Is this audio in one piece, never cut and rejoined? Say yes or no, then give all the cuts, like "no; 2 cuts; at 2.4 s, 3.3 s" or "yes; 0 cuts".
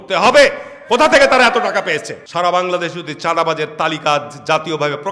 no; 1 cut; at 2.2 s